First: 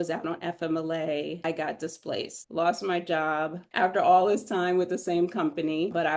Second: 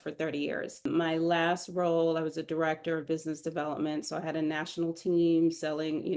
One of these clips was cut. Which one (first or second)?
first